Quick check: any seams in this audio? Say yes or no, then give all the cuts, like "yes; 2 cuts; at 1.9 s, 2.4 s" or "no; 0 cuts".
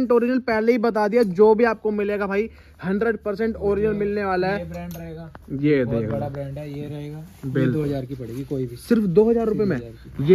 no; 0 cuts